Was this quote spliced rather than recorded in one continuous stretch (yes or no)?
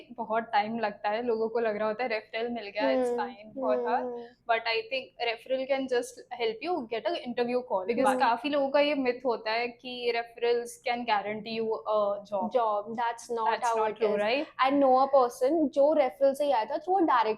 yes